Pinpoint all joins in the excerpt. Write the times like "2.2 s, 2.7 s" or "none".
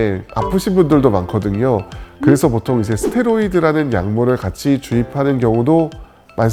none